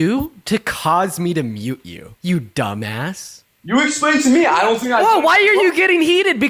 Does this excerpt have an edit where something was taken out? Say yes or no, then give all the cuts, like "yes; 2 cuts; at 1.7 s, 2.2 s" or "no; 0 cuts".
no; 0 cuts